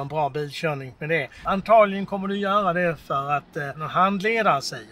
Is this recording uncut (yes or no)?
no